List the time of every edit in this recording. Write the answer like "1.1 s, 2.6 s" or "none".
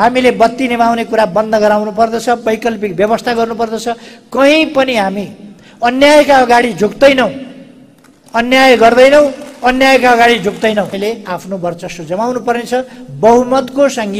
11.0 s